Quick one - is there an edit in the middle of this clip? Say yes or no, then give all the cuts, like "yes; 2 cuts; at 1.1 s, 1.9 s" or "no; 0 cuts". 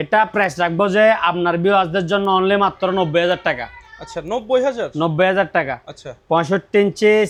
no; 0 cuts